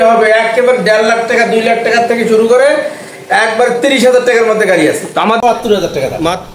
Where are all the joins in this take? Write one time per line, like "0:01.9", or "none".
0:05.4